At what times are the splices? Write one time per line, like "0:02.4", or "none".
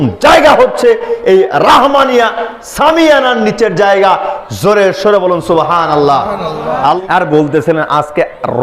0:06.9